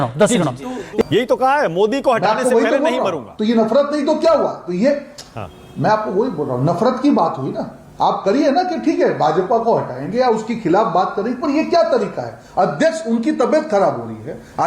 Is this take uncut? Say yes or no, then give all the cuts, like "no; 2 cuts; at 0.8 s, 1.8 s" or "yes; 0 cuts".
no; 1 cut; at 1.0 s